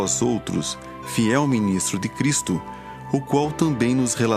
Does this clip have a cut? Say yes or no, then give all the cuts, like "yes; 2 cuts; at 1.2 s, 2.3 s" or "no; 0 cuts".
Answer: yes; 1 cut; at 1.3 s